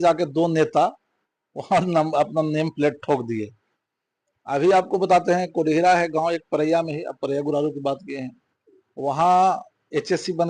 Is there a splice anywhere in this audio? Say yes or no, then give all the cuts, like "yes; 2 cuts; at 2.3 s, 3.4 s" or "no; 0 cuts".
no; 0 cuts